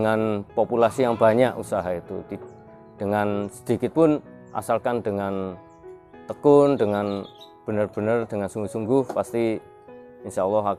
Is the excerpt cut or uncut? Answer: uncut